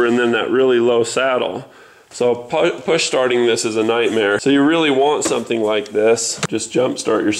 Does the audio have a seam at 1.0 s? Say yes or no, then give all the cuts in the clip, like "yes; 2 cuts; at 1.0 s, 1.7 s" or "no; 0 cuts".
no; 2 cuts; at 4.4 s, 6.4 s